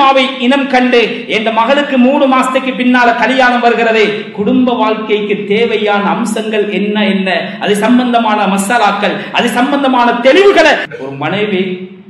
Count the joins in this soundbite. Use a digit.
1